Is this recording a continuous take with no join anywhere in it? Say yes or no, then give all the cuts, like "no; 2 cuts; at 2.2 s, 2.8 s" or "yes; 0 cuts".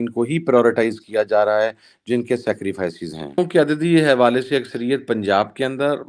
no; 1 cut; at 3.4 s